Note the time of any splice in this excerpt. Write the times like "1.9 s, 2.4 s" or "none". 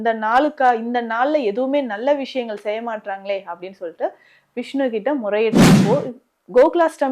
5.8 s